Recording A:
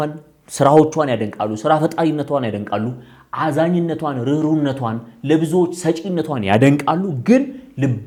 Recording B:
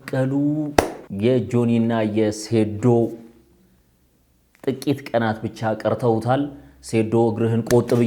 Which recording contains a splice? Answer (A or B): B